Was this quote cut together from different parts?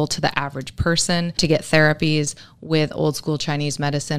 yes; 1 cut; at 1.4 s

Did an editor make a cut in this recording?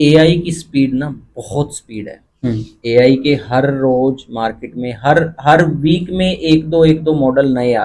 no; 0 cuts

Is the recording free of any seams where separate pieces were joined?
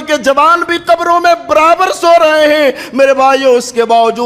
yes; 0 cuts

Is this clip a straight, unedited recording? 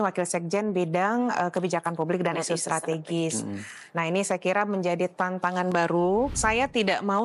no; 1 cut; at 6.3 s

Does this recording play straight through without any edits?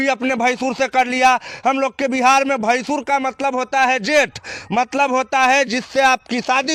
yes; 0 cuts

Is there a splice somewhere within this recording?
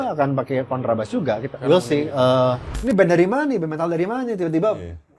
yes; 1 cut; at 2.7 s

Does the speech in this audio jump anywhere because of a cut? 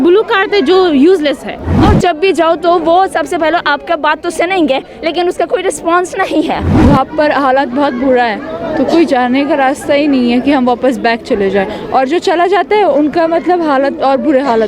yes; 2 cuts; at 1.7 s, 6.7 s

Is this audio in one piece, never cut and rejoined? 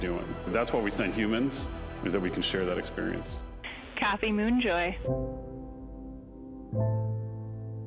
yes; 0 cuts

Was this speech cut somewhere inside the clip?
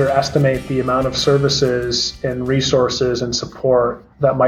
no; 0 cuts

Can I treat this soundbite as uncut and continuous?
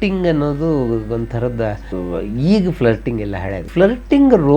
no; 2 cuts; at 1.9 s, 3.6 s

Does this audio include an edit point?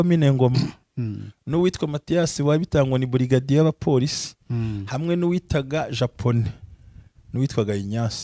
no; 0 cuts

